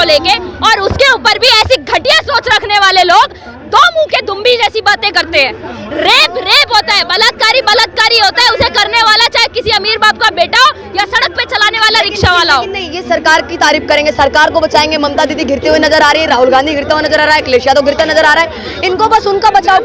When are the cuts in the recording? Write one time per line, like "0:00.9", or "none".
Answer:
none